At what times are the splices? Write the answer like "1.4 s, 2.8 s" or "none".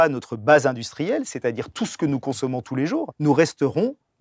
3.1 s